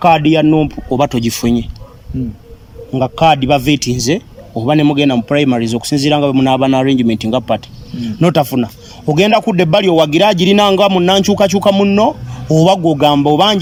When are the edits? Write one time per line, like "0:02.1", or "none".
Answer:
none

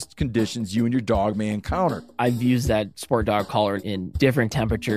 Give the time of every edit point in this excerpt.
0:02.1
0:03.9

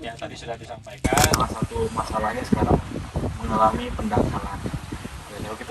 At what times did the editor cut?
0:01.2

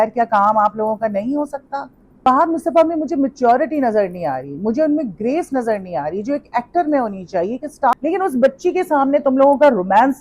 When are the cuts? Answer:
0:02.0
0:07.9

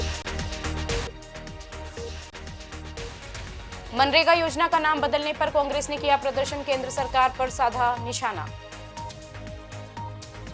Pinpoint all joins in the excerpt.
0:00.9

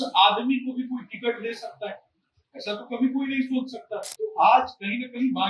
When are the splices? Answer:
0:04.0

